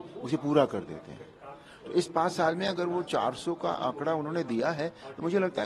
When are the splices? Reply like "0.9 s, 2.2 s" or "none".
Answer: none